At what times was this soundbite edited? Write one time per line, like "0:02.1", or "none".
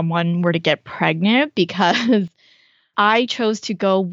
0:02.9